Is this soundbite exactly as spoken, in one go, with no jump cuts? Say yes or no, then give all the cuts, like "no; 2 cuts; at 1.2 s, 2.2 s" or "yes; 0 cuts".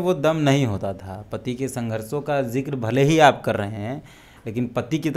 yes; 0 cuts